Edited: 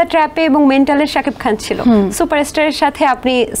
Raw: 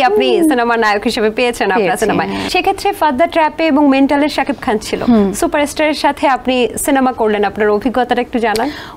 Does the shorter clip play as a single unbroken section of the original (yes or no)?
yes